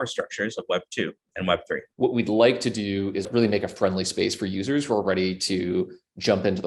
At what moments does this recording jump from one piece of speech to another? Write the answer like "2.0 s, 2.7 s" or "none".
1.9 s, 3.3 s